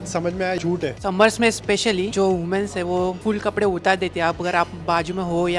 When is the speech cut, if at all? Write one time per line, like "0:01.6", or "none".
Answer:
0:01.0
0:03.2